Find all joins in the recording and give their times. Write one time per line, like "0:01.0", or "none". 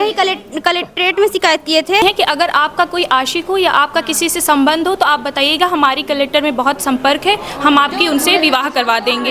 0:02.0